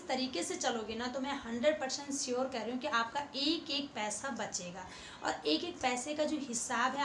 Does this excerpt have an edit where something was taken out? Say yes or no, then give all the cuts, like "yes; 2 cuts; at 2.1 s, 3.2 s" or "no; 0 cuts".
no; 0 cuts